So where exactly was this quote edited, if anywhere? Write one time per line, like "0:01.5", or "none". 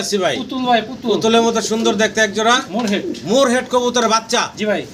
none